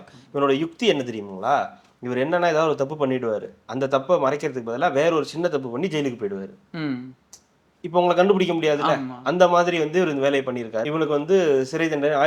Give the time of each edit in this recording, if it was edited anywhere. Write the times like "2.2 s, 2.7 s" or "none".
10.8 s